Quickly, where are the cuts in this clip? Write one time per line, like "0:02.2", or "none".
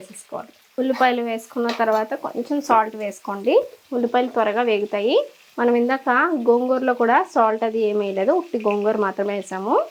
none